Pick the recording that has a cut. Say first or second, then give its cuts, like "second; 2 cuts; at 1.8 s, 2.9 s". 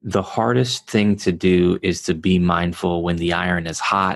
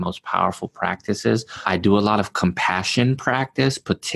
second; 1 cut; at 1.6 s